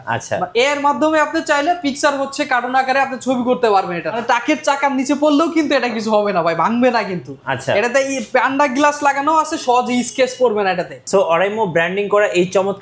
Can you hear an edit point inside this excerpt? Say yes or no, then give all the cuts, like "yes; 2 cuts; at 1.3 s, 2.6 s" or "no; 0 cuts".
yes; 2 cuts; at 4.2 s, 11.1 s